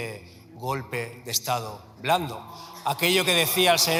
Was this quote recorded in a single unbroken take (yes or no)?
yes